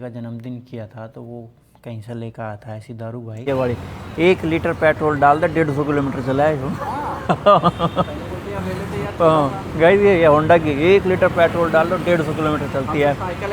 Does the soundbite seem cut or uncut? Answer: cut